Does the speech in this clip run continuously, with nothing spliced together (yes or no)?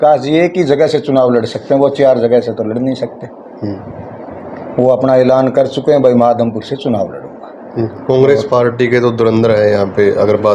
no